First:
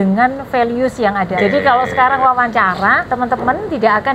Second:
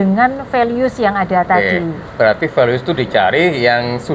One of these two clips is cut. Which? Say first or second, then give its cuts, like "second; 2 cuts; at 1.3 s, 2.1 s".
first; 2 cuts; at 1.3 s, 3.0 s